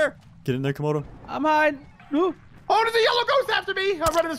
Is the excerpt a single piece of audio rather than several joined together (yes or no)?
no